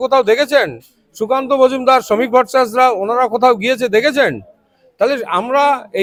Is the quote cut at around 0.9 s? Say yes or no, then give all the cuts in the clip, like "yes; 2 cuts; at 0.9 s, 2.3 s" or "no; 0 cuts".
no; 0 cuts